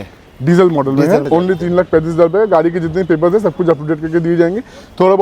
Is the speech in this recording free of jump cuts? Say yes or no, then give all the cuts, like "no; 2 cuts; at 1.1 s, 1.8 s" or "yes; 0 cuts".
no; 1 cut; at 1.2 s